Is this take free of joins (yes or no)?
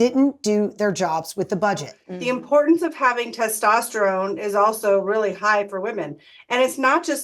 no